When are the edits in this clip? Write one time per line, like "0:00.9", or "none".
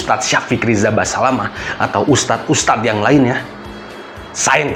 none